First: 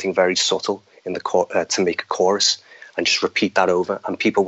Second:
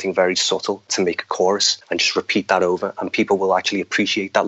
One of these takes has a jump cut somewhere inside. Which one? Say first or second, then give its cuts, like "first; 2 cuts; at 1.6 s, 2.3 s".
second; 2 cuts; at 0.9 s, 1.7 s